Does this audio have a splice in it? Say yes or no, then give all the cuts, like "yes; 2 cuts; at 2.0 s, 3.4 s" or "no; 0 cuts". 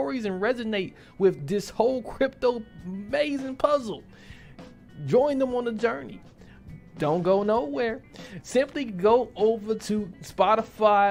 no; 0 cuts